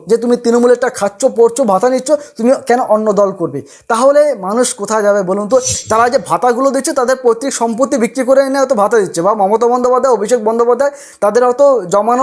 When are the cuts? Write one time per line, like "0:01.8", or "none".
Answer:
0:05.8

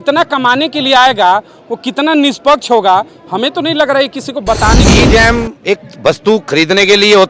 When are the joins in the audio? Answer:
0:04.8

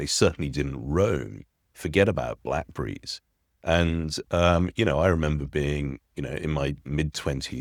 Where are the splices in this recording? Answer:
none

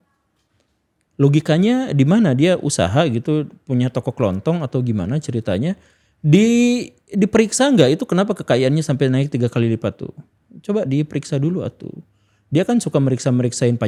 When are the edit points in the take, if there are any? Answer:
none

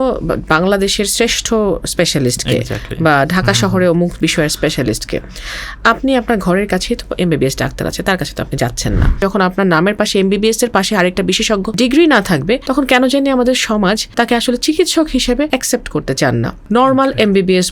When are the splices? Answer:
0:09.2
0:11.7
0:12.6
0:14.0
0:15.5
0:16.6

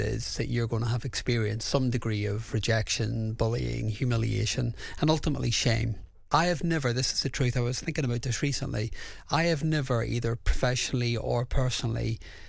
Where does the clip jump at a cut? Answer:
0:06.2

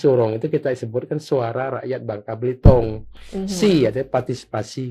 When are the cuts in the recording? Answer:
none

